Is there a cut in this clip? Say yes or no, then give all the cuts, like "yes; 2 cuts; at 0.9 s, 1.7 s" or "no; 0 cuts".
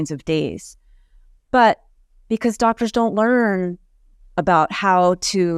no; 0 cuts